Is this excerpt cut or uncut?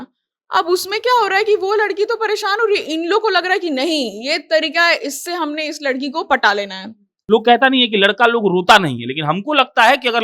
cut